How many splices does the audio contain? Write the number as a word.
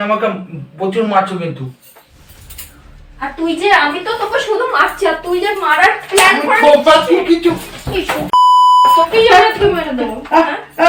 zero